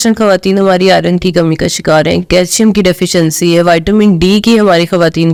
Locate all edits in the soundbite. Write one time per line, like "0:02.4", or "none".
none